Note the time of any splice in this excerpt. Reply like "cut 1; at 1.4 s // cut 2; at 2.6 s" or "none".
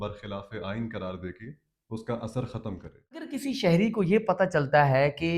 cut 1; at 3.4 s

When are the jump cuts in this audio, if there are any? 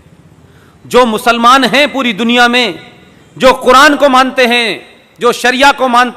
none

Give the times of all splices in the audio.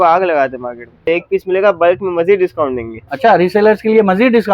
cut 1; at 0.9 s

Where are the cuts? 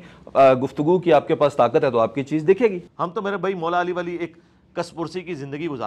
cut 1; at 2.9 s

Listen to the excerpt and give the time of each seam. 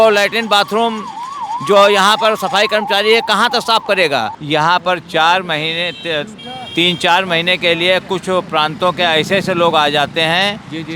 cut 1; at 4.4 s

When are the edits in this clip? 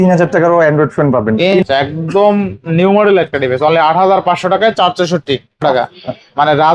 cut 1; at 1.6 s // cut 2; at 5.6 s

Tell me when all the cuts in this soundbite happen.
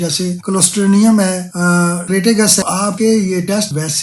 cut 1; at 2.6 s

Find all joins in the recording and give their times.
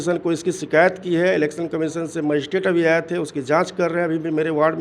none

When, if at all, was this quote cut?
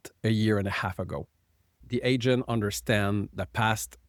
none

